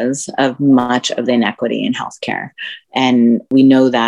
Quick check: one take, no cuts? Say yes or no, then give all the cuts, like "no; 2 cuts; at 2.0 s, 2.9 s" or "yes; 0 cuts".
yes; 0 cuts